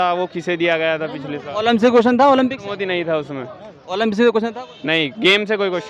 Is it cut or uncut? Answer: uncut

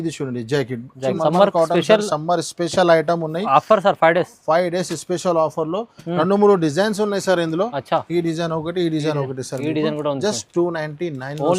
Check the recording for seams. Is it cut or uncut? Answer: cut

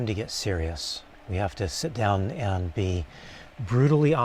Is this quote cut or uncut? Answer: uncut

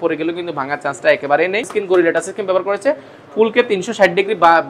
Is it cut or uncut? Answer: cut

